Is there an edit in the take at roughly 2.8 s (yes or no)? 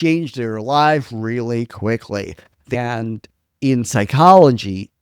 yes